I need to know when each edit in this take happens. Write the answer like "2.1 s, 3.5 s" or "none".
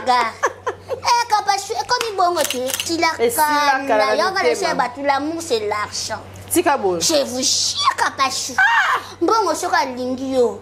2.8 s